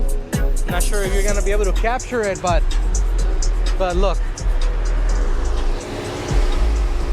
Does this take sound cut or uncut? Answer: uncut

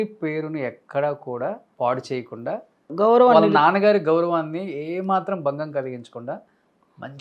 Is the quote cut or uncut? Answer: cut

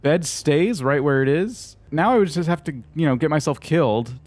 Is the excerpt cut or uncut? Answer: cut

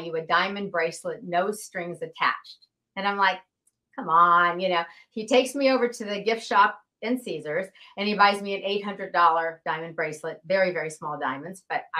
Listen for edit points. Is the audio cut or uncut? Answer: uncut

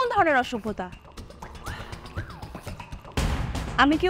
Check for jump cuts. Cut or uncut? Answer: uncut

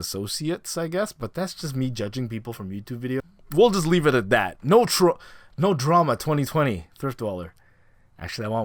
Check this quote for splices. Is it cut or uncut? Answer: uncut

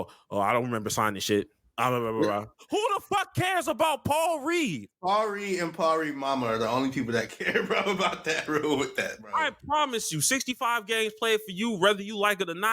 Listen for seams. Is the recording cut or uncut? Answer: cut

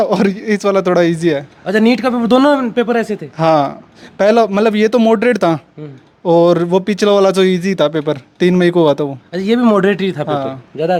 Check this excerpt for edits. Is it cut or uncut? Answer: uncut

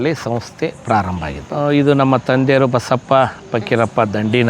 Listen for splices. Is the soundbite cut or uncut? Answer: cut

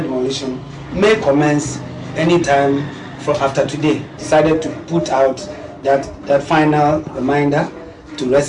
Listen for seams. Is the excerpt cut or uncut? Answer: cut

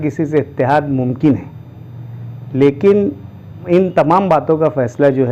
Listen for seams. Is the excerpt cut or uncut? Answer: cut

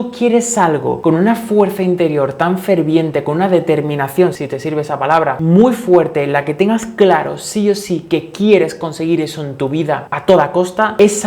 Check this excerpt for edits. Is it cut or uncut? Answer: cut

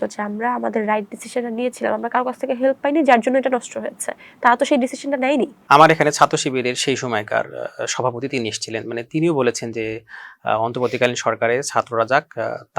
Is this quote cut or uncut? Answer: cut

